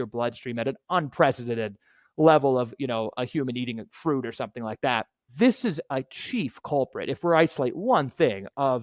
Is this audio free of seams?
no; 1 cut; at 5.2 s

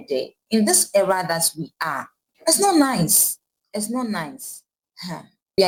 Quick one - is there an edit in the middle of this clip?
no; 0 cuts

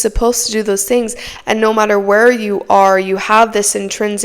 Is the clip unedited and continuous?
no; 1 cut; at 1.3 s

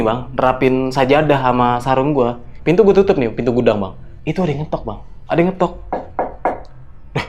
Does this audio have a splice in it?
yes; 2 cuts; at 2.5 s, 5.1 s

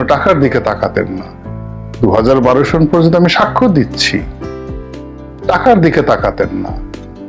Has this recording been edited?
no; 0 cuts

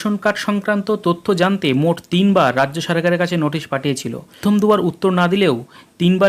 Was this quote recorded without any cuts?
no; 1 cut; at 4.4 s

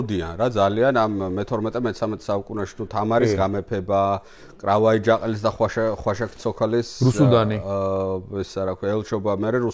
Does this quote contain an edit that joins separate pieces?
no; 0 cuts

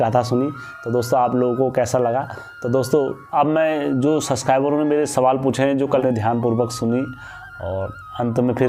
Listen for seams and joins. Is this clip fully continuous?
no; 1 cut; at 6.0 s

